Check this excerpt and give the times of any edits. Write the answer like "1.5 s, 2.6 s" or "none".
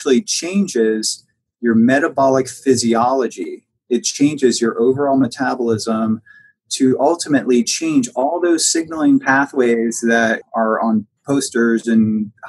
10.4 s